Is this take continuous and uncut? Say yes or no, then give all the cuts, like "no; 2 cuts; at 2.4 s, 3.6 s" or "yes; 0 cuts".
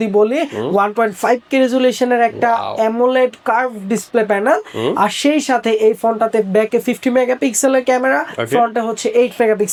yes; 0 cuts